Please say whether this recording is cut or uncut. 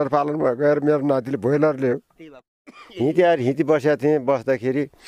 cut